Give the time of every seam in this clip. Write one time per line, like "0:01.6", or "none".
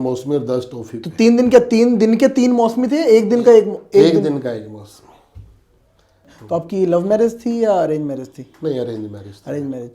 0:06.3